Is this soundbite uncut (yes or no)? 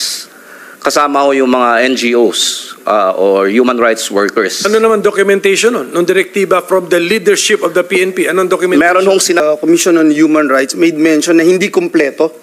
no